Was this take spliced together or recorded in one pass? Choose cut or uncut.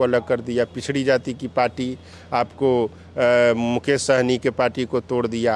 uncut